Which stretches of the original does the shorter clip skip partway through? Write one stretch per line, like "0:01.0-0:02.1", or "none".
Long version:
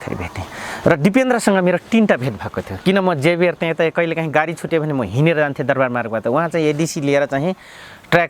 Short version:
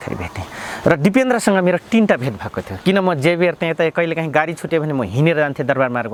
none